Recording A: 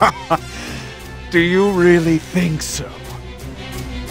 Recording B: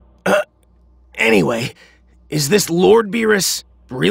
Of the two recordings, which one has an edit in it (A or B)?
A